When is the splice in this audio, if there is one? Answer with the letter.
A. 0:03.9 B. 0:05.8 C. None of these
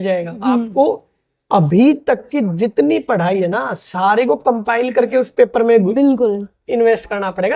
C